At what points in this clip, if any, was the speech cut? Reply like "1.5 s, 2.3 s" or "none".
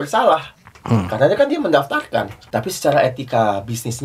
2.4 s